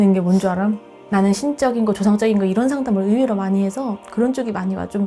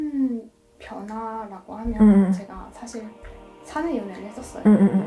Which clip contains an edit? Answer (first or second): first